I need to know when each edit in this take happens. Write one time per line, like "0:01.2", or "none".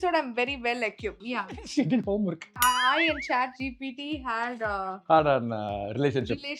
0:01.2
0:02.6